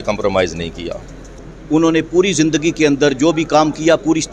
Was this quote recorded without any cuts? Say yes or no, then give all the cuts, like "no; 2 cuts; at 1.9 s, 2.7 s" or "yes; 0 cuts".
no; 1 cut; at 1.5 s